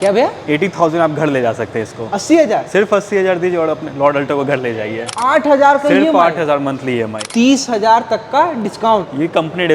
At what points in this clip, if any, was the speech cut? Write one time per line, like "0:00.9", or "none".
0:05.1
0:07.2

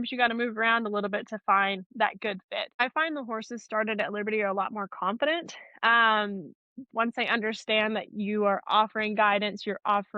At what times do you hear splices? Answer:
0:02.8
0:06.9

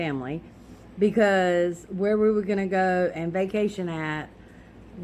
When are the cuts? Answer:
none

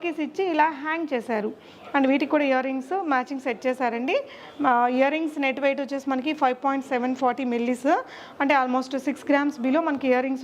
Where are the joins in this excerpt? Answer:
none

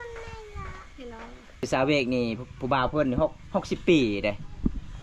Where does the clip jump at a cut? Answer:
0:01.6

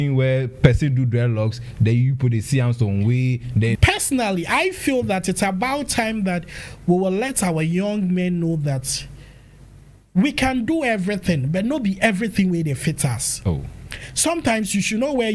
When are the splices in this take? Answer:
0:03.8

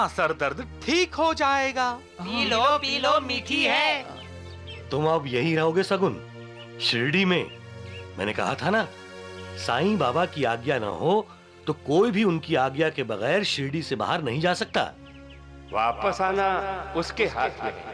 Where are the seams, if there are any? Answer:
none

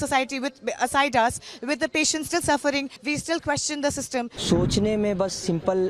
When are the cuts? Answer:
0:02.9
0:04.3

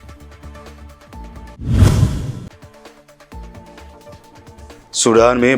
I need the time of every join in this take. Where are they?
0:01.0

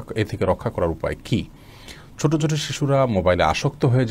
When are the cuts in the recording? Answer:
none

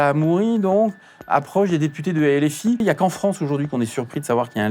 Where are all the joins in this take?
0:02.8

